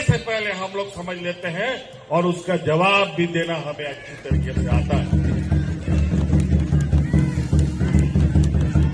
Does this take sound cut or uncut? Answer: uncut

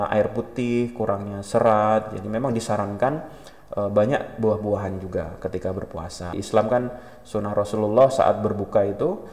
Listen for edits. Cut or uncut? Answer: cut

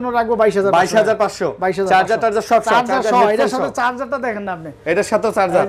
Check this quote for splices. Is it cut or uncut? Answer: uncut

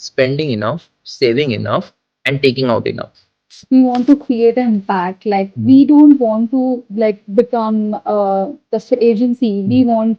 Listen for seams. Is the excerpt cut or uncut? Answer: cut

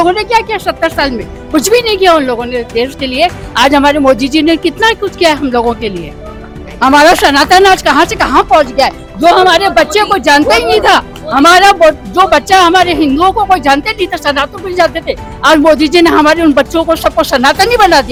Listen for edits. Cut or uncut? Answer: uncut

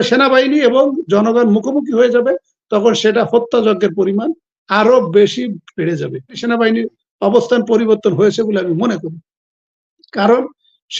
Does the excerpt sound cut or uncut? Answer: cut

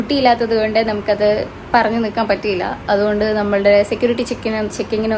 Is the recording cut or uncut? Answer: uncut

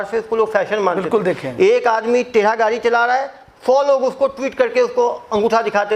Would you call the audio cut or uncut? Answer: uncut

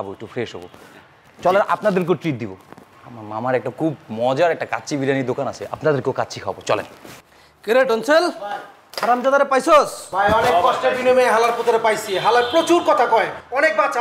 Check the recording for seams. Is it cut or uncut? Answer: cut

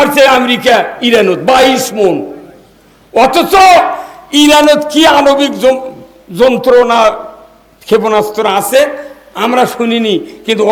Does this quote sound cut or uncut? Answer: uncut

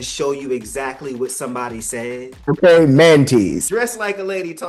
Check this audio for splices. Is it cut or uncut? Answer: cut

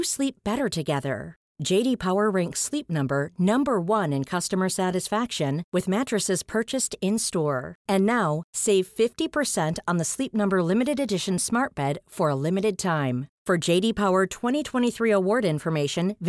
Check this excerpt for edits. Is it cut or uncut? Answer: uncut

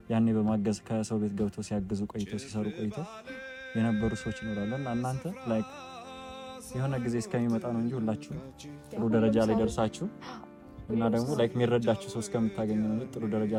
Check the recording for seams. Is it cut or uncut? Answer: uncut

